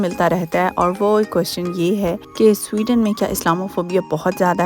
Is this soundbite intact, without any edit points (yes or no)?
no